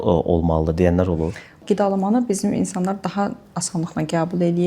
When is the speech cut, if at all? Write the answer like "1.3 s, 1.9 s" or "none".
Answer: 1.6 s